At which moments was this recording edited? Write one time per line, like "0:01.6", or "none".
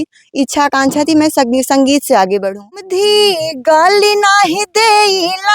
0:02.8